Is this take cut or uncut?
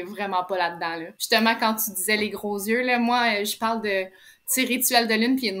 cut